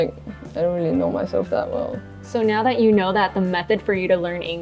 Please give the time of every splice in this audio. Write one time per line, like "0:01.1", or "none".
0:02.2